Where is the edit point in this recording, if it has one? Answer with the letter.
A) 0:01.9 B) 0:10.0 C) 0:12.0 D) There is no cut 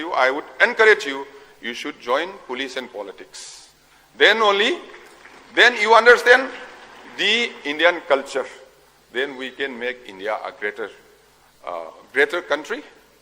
C